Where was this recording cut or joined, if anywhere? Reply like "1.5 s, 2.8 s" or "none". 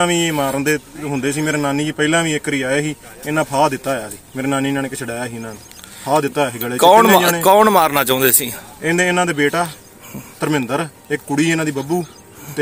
none

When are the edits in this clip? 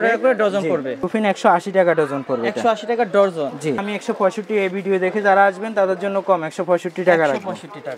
1.0 s, 3.8 s

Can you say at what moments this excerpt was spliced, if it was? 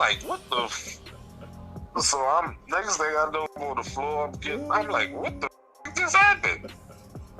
1.8 s, 3.6 s, 5.8 s

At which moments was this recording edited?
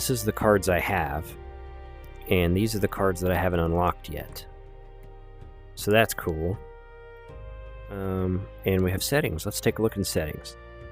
8.0 s

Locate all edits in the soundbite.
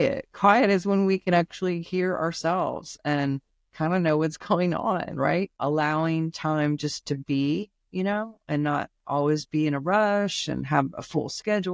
5.5 s

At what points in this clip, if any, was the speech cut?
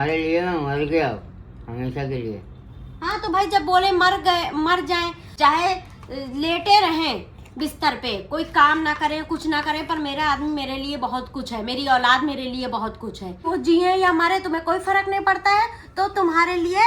5.2 s, 13.5 s

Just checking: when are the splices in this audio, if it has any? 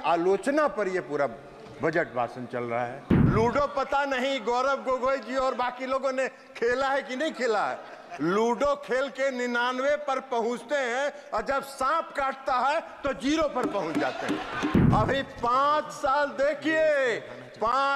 3.2 s, 14.8 s

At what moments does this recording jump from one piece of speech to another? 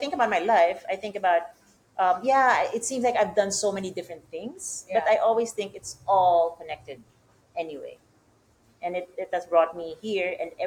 none

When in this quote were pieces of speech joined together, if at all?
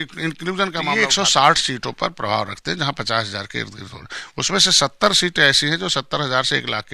1.0 s

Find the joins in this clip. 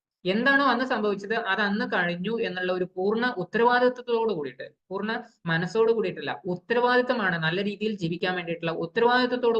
none

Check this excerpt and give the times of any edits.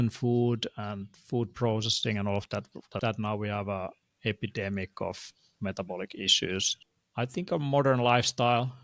3.0 s, 6.7 s

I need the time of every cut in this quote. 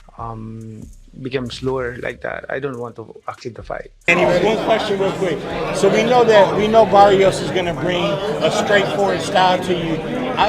4.1 s

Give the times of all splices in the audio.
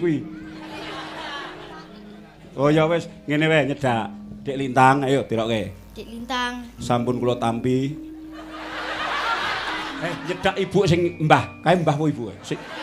10.2 s

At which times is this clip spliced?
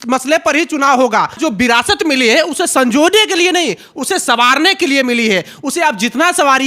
1.4 s

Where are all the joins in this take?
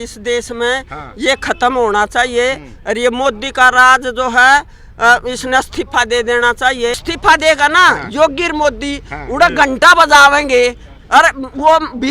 7.1 s

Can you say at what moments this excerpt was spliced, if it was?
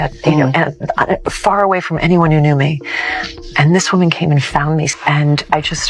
4.9 s

